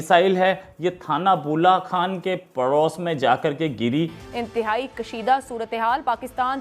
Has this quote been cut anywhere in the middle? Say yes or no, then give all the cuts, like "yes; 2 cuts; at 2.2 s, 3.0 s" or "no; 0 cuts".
yes; 1 cut; at 4.3 s